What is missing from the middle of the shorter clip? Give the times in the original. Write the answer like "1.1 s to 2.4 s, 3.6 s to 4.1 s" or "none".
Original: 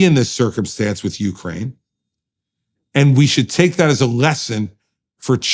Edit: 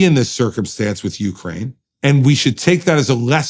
1.8 s to 2.7 s